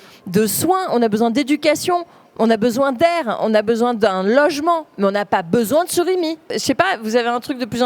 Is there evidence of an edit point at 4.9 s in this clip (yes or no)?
no